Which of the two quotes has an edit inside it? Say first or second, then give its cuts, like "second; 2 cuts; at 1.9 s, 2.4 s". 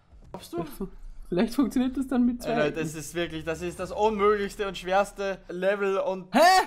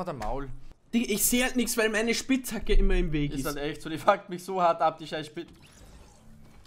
first; 1 cut; at 5.4 s